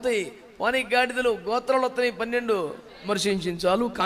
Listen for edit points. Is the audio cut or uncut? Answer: cut